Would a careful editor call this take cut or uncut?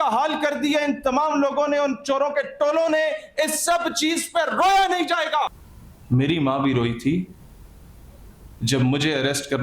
cut